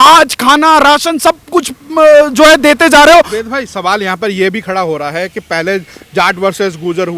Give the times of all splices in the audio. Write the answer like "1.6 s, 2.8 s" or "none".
none